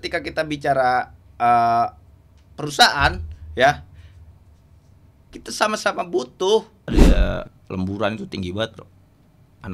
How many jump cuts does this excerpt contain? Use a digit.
1